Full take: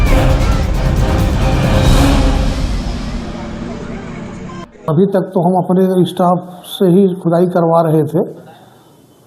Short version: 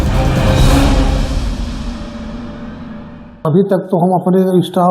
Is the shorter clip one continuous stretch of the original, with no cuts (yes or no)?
no